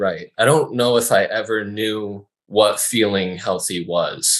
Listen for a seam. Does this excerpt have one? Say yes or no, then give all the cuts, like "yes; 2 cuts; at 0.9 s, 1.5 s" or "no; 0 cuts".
no; 0 cuts